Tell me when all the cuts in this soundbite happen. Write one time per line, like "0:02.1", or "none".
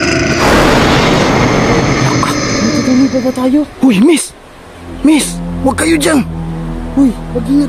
none